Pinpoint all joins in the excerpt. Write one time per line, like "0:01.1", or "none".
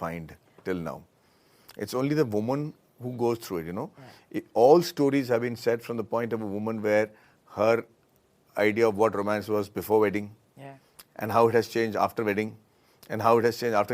none